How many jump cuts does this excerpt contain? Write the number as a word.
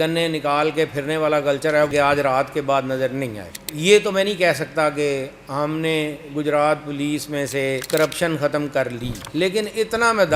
two